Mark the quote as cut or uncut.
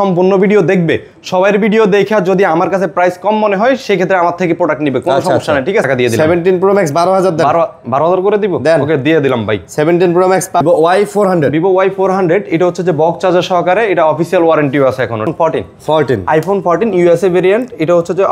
cut